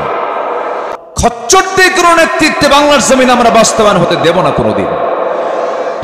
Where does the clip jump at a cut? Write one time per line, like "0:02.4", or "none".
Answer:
0:00.9